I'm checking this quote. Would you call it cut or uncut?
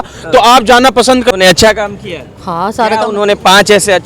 cut